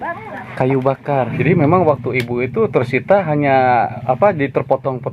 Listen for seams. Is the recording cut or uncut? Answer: cut